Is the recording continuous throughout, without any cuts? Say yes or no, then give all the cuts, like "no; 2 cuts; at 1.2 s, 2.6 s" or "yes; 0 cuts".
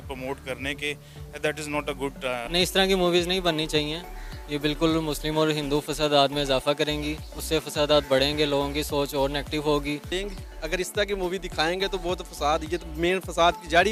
yes; 0 cuts